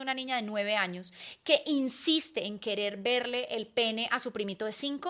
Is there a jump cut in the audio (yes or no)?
no